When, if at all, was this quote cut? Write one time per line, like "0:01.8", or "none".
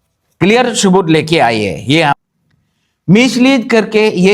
0:02.1